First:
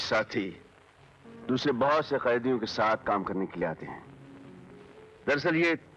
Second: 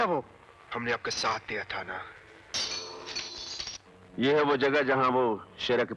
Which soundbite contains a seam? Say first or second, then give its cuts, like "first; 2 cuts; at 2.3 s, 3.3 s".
second; 1 cut; at 2.5 s